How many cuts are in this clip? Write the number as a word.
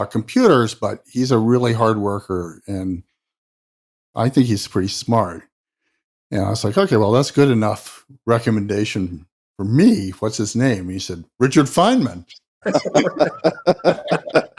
zero